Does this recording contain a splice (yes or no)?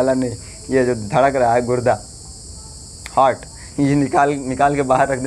no